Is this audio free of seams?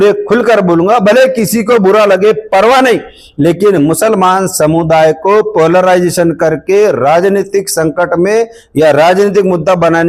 yes; 0 cuts

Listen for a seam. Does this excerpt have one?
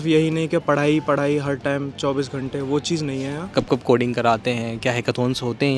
yes; 1 cut; at 3.5 s

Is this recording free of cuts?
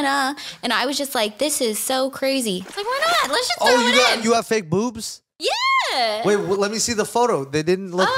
no; 1 cut; at 2.6 s

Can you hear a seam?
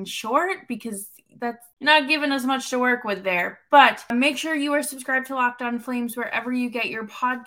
yes; 2 cuts; at 1.7 s, 4.1 s

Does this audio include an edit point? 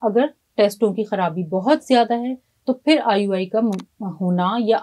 no; 0 cuts

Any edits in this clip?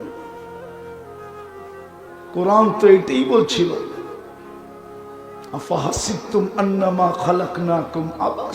yes; 2 cuts; at 4.0 s, 5.5 s

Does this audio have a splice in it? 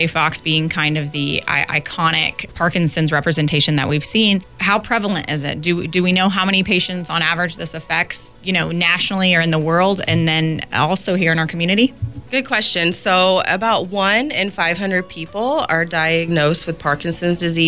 no; 0 cuts

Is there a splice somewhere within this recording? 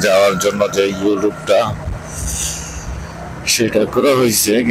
no; 0 cuts

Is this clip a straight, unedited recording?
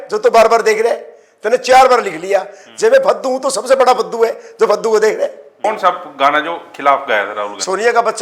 no; 1 cut; at 5.6 s

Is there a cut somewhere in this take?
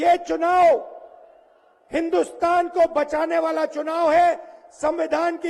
no; 0 cuts

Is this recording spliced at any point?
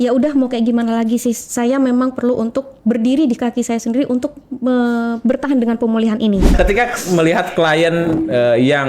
yes; 1 cut; at 6.5 s

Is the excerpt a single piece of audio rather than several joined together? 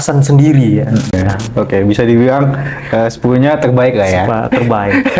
no; 1 cut; at 1.1 s

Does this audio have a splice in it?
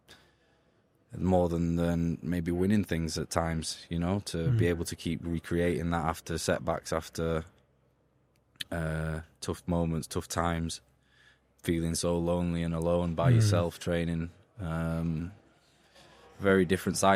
no; 0 cuts

